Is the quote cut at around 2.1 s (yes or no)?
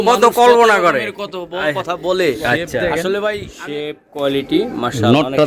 no